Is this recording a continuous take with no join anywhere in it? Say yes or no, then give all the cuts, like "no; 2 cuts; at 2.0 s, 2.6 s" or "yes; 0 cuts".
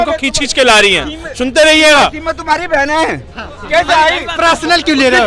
yes; 0 cuts